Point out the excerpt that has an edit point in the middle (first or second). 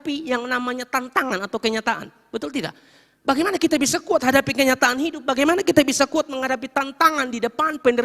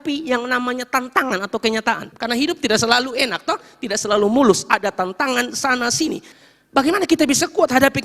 second